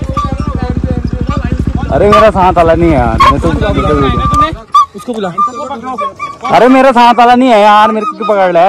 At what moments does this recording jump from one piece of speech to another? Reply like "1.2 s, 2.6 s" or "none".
1.9 s